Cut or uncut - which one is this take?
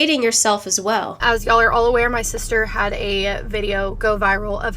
cut